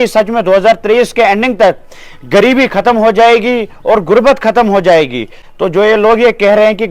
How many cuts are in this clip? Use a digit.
1